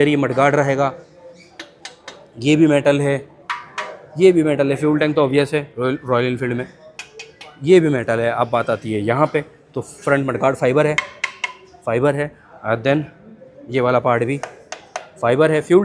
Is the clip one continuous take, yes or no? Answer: yes